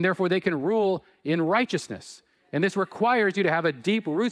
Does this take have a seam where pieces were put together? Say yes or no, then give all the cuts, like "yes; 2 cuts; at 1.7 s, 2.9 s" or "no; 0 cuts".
no; 0 cuts